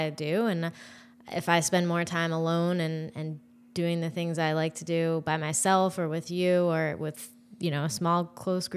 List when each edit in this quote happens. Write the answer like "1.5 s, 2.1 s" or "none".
none